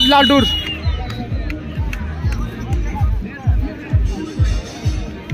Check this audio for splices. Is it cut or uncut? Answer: cut